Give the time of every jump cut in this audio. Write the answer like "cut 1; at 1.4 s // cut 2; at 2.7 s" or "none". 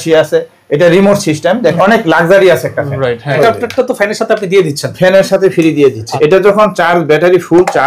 cut 1; at 1.8 s // cut 2; at 3.4 s // cut 3; at 6.1 s